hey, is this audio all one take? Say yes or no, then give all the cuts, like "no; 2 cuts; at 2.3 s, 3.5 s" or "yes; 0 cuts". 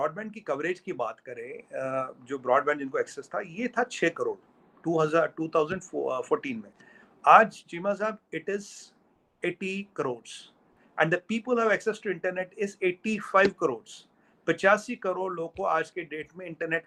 yes; 0 cuts